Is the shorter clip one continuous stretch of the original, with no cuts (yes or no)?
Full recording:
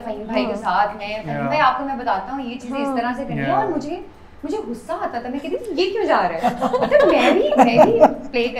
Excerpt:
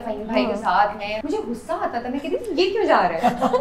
no